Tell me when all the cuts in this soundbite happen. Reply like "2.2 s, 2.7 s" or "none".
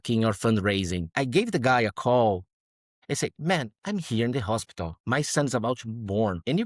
1.1 s, 2.7 s